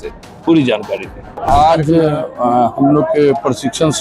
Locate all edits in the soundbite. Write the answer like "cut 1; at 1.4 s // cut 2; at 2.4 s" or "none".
cut 1; at 1.5 s